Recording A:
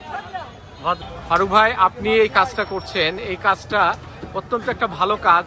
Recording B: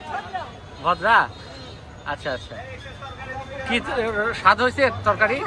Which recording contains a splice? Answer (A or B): A